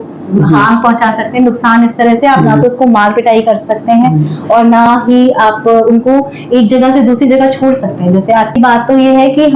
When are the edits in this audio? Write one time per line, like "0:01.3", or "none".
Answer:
0:08.6